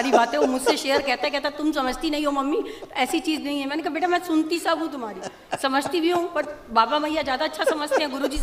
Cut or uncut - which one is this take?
uncut